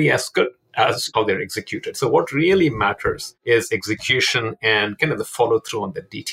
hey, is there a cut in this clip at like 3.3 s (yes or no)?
yes